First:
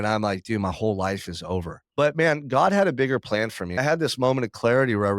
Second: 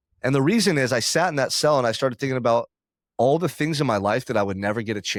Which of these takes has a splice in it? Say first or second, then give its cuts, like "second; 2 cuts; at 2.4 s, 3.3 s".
first; 2 cuts; at 1.8 s, 3.8 s